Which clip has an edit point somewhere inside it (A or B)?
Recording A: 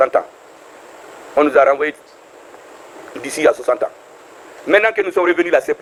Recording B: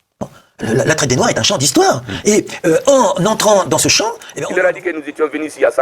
B